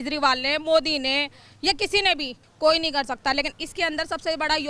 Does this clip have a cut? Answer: yes; 1 cut; at 2.4 s

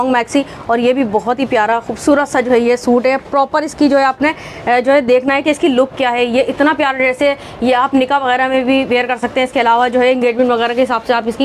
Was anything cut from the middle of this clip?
no; 0 cuts

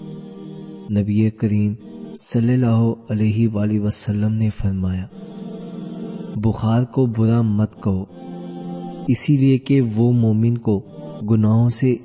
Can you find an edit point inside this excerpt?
no; 0 cuts

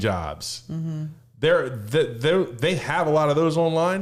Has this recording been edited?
no; 0 cuts

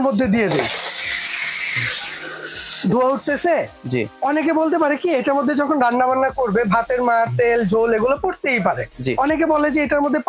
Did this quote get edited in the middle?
no; 0 cuts

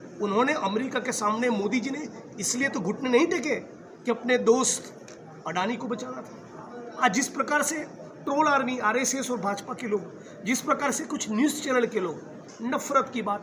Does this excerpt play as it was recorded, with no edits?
yes; 0 cuts

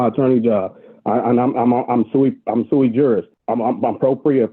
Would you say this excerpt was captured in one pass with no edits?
no; 1 cut; at 3.3 s

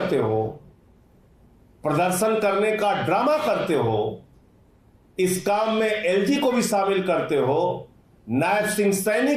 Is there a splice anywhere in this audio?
no; 0 cuts

